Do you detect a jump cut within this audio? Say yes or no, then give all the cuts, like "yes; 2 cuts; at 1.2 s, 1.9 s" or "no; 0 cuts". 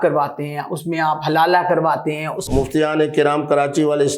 yes; 1 cut; at 2.4 s